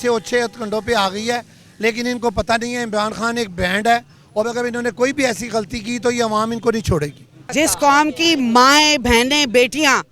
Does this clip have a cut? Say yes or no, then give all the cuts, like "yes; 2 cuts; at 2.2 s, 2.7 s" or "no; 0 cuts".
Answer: yes; 1 cut; at 7.3 s